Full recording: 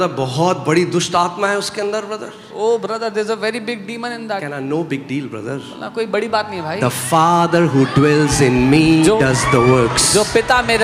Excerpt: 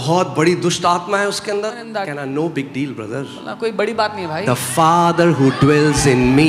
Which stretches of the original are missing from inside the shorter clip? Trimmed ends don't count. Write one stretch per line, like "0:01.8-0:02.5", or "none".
0:02.1-0:04.2